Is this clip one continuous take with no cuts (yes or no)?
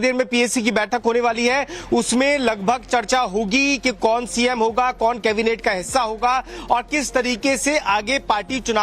no